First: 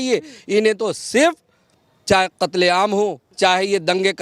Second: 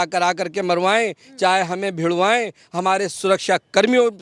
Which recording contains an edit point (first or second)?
first